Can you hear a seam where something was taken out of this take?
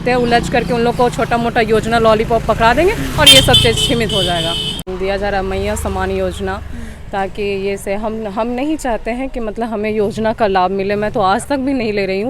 yes; 1 cut; at 4.8 s

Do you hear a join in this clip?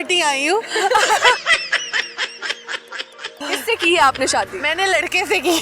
yes; 2 cuts; at 1.4 s, 3.5 s

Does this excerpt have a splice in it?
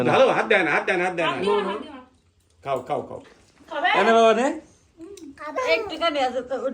yes; 2 cuts; at 3.2 s, 5.6 s

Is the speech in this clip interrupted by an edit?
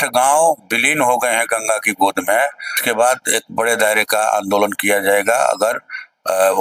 yes; 1 cut; at 2.7 s

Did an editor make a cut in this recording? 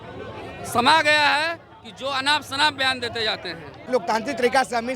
yes; 1 cut; at 3.9 s

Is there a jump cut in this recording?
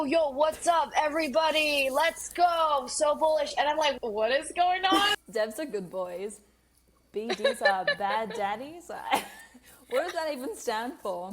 yes; 2 cuts; at 4.0 s, 5.1 s

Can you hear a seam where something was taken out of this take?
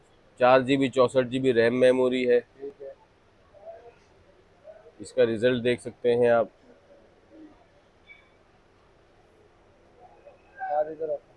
no; 0 cuts

